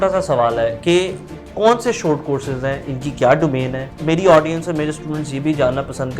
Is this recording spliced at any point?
yes; 2 cuts; at 1.5 s, 3.9 s

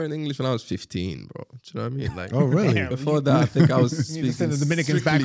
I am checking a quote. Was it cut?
no; 0 cuts

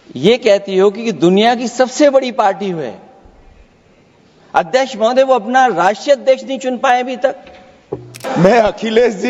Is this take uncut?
no; 1 cut; at 8.2 s

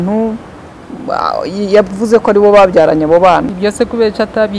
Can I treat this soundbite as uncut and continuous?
no; 1 cut; at 3.5 s

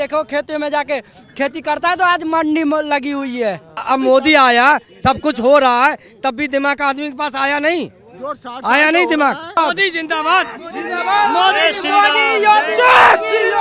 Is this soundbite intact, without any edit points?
no; 2 cuts; at 3.8 s, 9.6 s

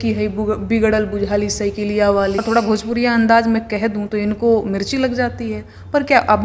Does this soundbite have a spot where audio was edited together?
yes; 1 cut; at 2.4 s

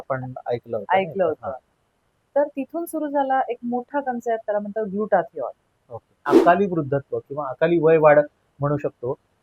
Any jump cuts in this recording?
yes; 1 cut; at 6.2 s

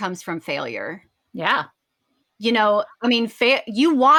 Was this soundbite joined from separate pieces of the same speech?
no; 0 cuts

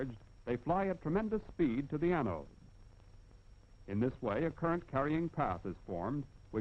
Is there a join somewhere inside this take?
no; 0 cuts

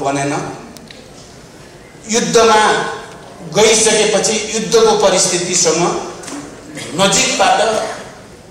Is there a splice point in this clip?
no; 0 cuts

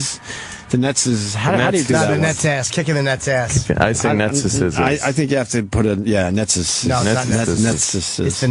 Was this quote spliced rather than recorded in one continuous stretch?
yes; 1 cut; at 2.7 s

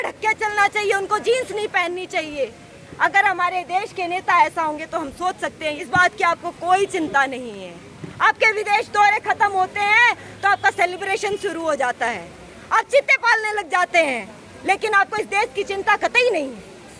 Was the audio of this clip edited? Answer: yes; 1 cut; at 5.8 s

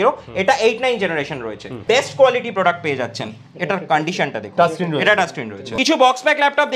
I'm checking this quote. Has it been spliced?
yes; 2 cuts; at 1.8 s, 5.7 s

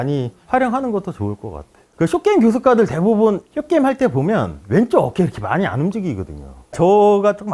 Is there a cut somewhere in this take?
yes; 2 cuts; at 1.9 s, 6.8 s

